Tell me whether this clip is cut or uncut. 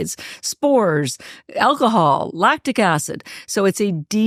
uncut